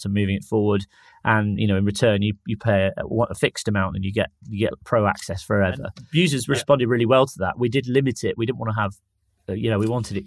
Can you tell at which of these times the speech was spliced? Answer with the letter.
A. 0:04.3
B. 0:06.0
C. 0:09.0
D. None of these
B